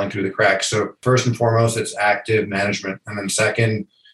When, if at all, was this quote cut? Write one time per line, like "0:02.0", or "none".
0:01.0